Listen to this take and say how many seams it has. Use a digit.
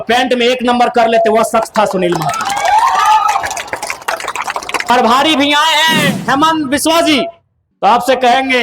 1